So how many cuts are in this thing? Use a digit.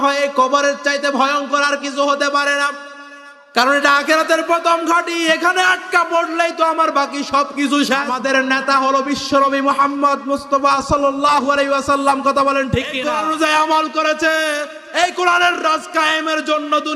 2